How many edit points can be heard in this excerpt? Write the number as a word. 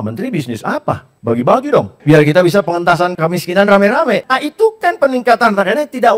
four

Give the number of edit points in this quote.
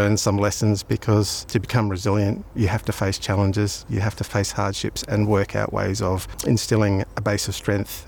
four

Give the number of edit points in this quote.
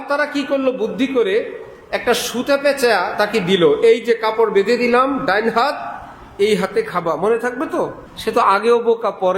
one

